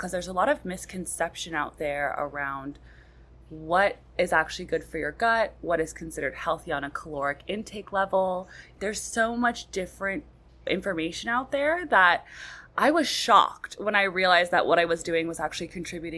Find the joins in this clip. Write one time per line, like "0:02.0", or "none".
0:08.7
0:10.7